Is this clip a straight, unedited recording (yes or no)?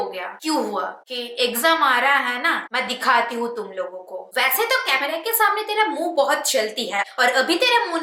no